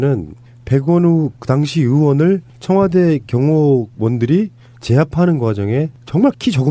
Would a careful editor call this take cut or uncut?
cut